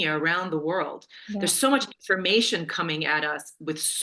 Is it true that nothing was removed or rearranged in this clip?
yes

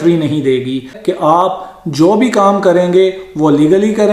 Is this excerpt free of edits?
no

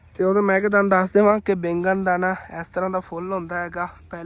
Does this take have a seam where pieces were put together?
no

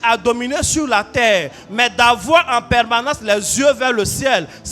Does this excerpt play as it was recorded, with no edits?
yes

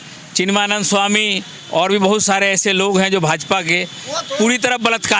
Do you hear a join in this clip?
no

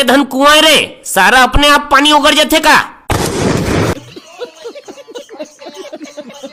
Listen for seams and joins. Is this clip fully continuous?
yes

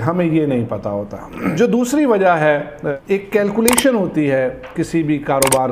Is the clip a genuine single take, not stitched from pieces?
no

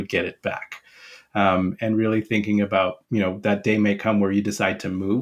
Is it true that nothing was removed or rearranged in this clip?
no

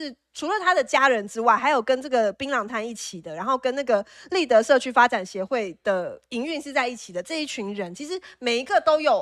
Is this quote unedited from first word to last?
yes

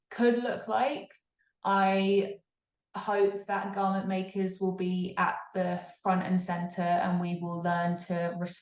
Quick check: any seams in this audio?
no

